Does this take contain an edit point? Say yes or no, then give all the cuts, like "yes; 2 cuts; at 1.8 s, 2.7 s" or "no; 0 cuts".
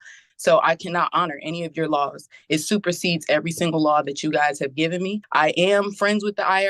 yes; 1 cut; at 5.2 s